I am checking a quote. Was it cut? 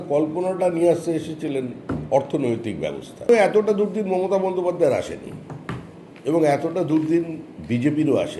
yes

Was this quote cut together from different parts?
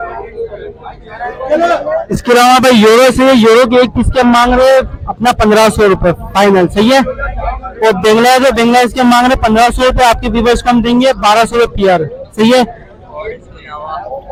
no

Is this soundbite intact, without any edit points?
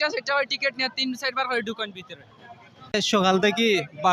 no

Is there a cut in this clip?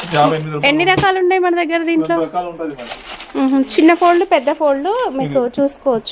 no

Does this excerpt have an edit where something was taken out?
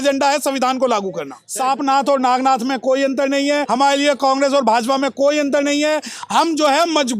yes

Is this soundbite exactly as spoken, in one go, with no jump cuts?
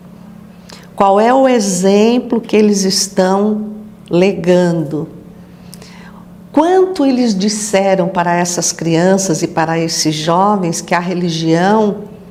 yes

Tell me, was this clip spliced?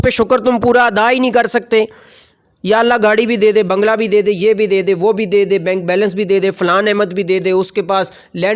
no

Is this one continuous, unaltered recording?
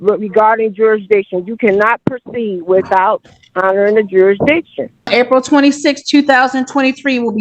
no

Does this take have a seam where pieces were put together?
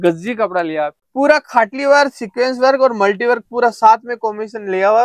yes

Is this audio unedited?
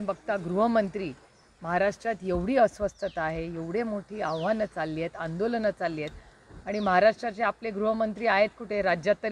yes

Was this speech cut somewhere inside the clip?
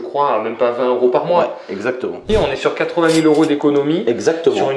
yes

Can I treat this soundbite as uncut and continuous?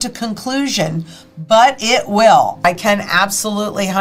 no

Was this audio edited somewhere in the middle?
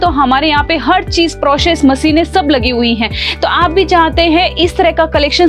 no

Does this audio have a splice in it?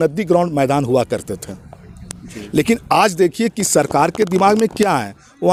no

